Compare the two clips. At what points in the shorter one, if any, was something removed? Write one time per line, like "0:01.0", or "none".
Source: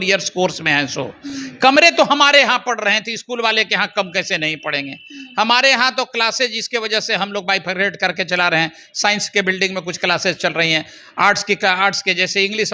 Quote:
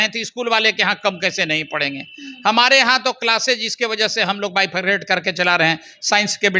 none